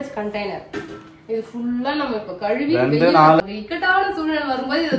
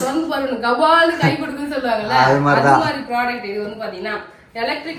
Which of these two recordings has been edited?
first; 1 cut; at 3.4 s

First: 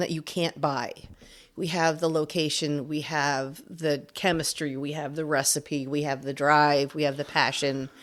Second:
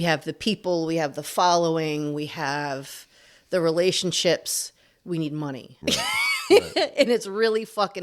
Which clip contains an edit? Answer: second; 1 cut; at 5.7 s

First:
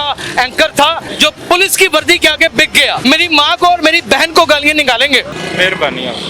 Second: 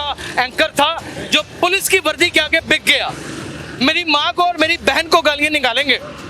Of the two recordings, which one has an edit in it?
first; 3 cuts; at 1.1 s, 3.0 s, 5.4 s

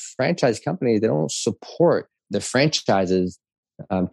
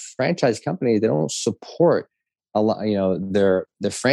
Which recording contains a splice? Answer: first; 1 cut; at 2.3 s

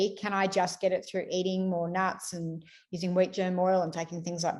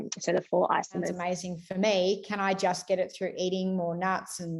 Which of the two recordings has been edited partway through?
second; 1 cut; at 1.1 s

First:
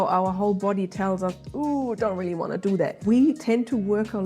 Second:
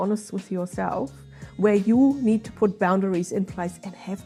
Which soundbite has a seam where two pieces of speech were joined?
first; 1 cut; at 3.0 s

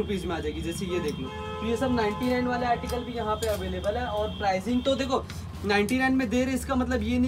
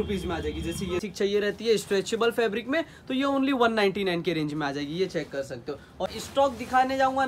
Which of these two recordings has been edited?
second; 2 cuts; at 1.0 s, 6.1 s

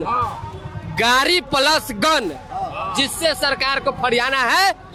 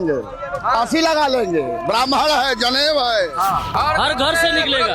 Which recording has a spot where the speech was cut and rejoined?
second; 1 cut; at 3.7 s

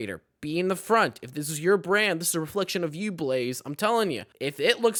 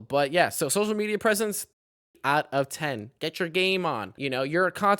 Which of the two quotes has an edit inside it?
second; 2 cuts; at 1.7 s, 3.1 s

